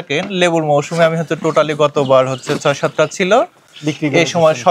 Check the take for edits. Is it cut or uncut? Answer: uncut